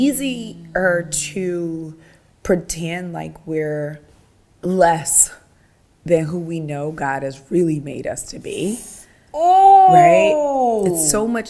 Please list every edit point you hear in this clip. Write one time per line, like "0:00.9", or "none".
none